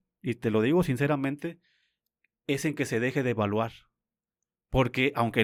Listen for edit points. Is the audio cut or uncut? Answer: uncut